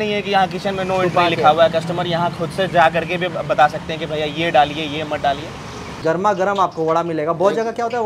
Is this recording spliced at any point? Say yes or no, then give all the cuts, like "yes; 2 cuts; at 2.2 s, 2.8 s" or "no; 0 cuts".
yes; 1 cut; at 6.0 s